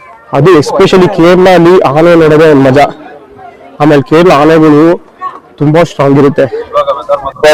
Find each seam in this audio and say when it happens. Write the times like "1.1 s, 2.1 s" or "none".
6.6 s